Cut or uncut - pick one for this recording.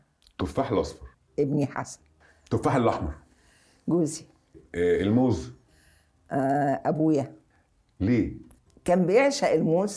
uncut